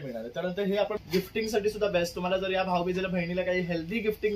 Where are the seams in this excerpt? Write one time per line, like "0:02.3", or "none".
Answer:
0:01.0